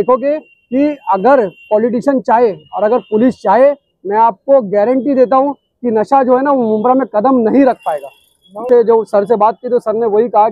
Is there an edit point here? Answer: yes; 1 cut; at 8.6 s

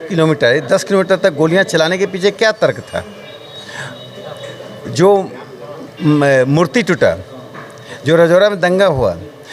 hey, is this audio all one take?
yes; 0 cuts

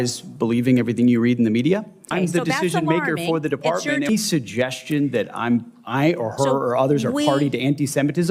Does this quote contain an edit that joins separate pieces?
yes; 2 cuts; at 2.1 s, 4.1 s

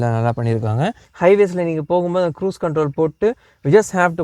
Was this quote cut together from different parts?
yes; 1 cut; at 1.0 s

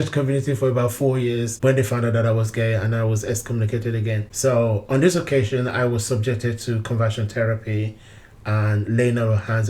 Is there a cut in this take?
yes; 2 cuts; at 1.5 s, 4.3 s

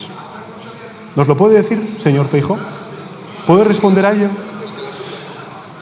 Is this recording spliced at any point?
no; 0 cuts

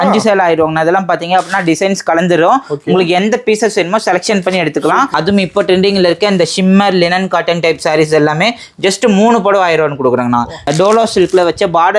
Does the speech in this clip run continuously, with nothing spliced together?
no; 2 cuts; at 5.1 s, 10.7 s

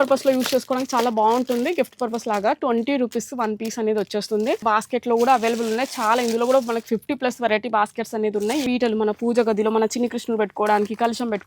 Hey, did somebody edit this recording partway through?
yes; 2 cuts; at 4.6 s, 8.6 s

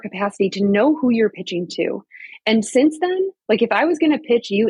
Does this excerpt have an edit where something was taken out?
no; 0 cuts

